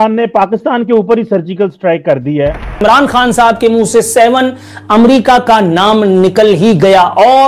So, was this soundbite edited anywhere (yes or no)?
yes